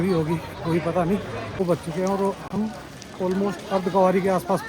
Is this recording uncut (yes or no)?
no